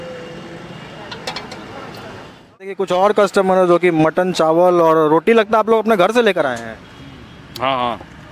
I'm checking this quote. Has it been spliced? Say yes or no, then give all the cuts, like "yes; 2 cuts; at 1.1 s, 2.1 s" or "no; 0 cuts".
yes; 1 cut; at 2.9 s